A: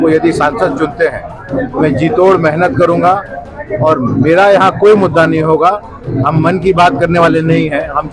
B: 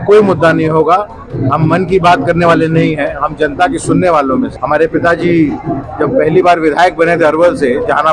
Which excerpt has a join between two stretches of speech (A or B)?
B